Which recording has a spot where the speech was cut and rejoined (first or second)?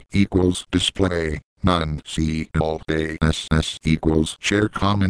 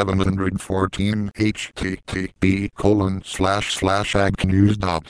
second